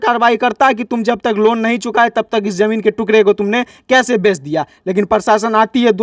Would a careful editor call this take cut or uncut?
uncut